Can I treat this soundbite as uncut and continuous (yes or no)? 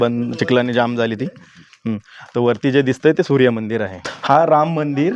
yes